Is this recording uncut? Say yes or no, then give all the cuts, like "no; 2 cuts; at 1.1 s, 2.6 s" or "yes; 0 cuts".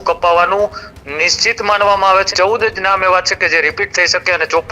no; 1 cut; at 2.3 s